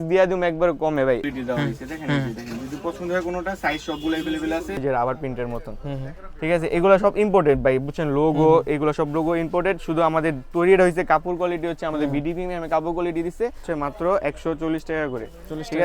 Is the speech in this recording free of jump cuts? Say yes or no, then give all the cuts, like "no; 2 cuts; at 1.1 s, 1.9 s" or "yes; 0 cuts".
no; 3 cuts; at 1.2 s, 4.8 s, 13.6 s